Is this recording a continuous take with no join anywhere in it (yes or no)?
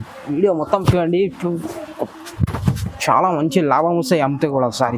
yes